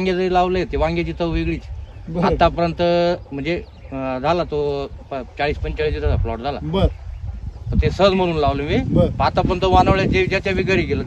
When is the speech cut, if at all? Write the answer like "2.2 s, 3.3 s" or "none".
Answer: none